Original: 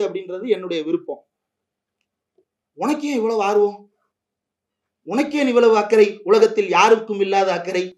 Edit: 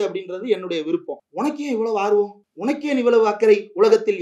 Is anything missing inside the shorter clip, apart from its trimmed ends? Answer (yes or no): yes